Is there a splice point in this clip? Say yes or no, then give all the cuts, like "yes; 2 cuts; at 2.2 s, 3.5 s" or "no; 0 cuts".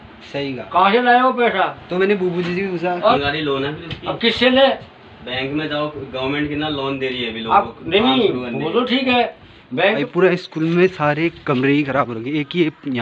yes; 2 cuts; at 3.1 s, 10.0 s